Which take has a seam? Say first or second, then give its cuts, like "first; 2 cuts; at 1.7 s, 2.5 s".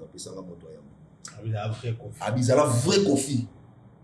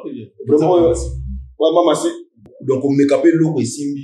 second; 1 cut; at 2.5 s